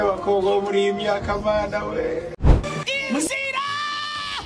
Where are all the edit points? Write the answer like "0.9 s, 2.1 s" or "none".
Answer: 2.6 s